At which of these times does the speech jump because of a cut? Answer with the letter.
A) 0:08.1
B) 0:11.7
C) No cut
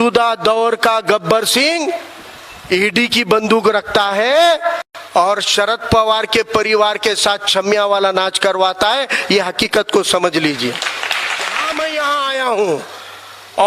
B